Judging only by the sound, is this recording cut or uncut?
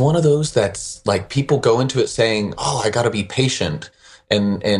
uncut